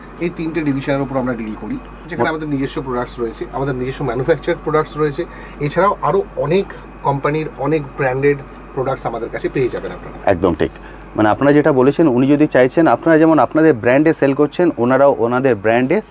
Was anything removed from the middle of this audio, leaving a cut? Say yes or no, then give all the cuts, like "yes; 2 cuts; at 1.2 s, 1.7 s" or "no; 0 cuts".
no; 0 cuts